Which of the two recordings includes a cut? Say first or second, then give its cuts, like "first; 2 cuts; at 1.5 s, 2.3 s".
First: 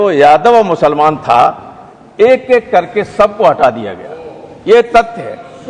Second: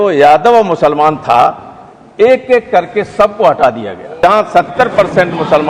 second; 1 cut; at 4.2 s